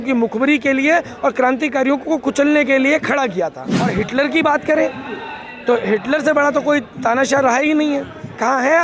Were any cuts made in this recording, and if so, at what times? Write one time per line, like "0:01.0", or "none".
0:03.9

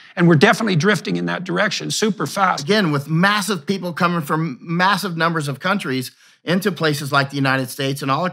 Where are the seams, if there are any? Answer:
0:02.6

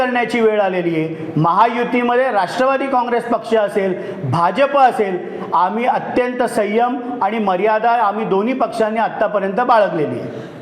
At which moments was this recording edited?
none

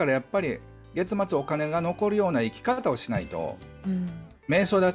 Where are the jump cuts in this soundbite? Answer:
none

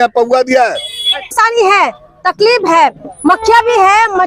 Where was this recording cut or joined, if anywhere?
0:01.3

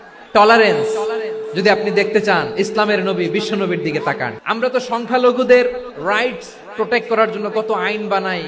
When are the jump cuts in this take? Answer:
0:04.3

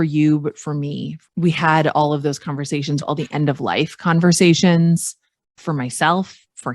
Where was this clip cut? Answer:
0:01.1
0:03.0
0:05.6

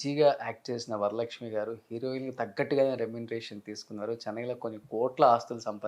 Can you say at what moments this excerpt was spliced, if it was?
none

